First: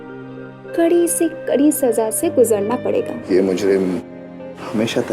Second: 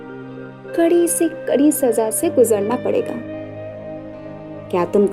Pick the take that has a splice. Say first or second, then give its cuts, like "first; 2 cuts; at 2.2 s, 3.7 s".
first; 1 cut; at 3.2 s